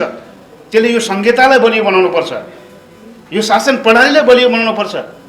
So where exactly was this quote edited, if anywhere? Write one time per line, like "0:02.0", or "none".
none